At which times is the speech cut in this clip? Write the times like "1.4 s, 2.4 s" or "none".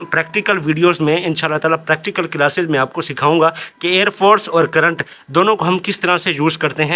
none